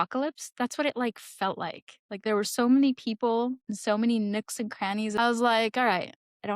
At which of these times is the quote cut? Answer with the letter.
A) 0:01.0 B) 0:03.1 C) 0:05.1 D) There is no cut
C